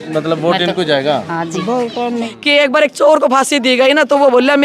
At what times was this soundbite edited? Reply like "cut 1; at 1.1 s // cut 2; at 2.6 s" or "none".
cut 1; at 2.3 s